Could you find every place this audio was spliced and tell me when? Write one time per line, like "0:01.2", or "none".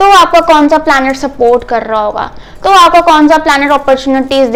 none